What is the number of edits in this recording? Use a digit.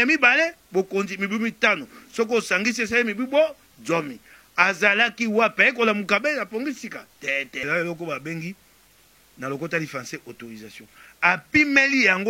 1